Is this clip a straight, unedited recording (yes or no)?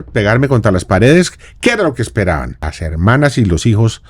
no